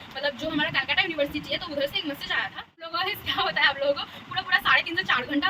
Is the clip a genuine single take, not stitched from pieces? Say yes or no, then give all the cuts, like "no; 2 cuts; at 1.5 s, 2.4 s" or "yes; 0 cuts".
no; 1 cut; at 2.9 s